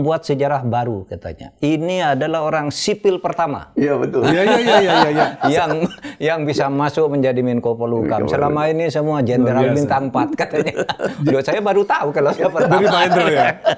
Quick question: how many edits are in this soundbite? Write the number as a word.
zero